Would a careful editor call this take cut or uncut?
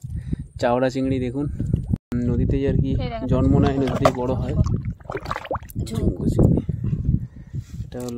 cut